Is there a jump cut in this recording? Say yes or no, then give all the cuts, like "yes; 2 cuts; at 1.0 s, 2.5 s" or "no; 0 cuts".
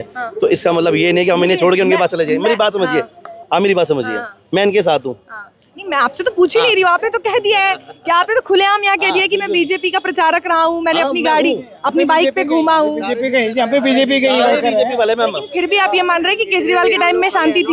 no; 0 cuts